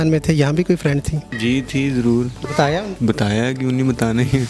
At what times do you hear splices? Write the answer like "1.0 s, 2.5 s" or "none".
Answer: 1.2 s, 2.9 s